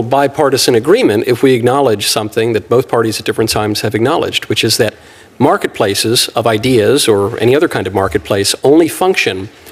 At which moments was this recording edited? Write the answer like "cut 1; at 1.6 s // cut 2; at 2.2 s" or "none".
none